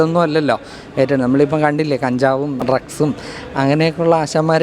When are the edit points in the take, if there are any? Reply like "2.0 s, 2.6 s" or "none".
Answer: 2.6 s